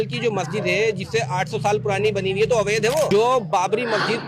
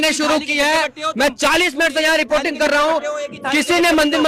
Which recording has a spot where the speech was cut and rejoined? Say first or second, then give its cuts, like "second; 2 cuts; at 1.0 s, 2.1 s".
first; 1 cut; at 3.1 s